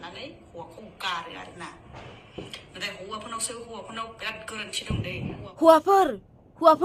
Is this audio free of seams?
yes; 0 cuts

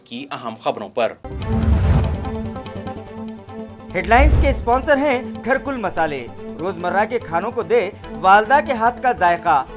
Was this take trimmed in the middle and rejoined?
yes; 1 cut; at 1.2 s

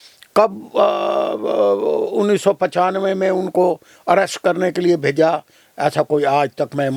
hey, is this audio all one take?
yes; 0 cuts

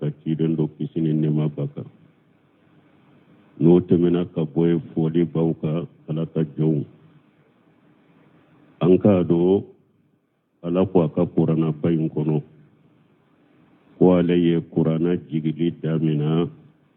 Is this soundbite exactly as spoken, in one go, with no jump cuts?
no; 1 cut; at 14.3 s

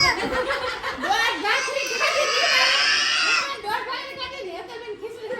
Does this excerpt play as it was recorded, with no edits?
yes; 0 cuts

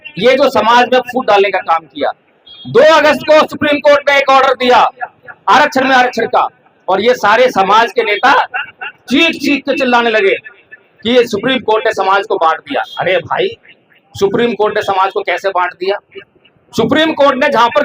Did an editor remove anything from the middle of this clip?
no; 0 cuts

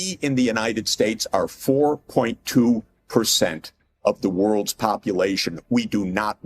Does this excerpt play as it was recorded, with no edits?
yes; 0 cuts

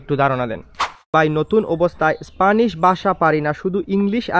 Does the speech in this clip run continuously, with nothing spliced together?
no; 1 cut; at 1.1 s

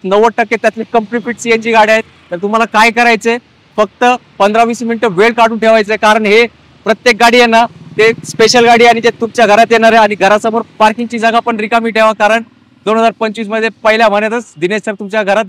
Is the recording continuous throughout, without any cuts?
yes; 0 cuts

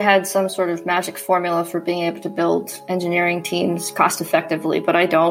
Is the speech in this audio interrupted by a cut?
no; 0 cuts

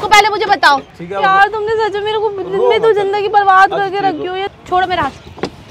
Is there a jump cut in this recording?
yes; 2 cuts; at 1.0 s, 4.5 s

